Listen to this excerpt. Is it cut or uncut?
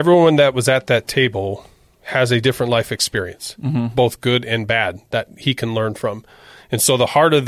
cut